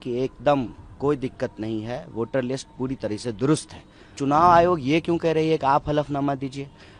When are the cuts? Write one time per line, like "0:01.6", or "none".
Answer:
0:04.2